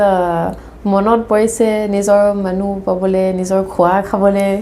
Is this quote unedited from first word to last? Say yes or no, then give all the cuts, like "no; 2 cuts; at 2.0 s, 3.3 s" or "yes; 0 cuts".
yes; 0 cuts